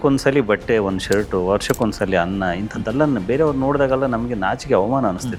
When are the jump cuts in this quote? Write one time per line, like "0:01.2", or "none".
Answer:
none